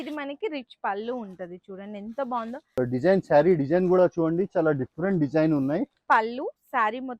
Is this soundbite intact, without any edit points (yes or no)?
no